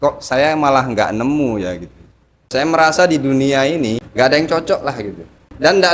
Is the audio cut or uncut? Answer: cut